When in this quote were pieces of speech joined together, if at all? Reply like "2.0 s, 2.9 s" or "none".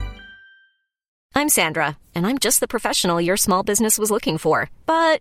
1.2 s